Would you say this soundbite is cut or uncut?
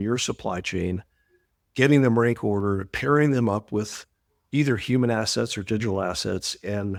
uncut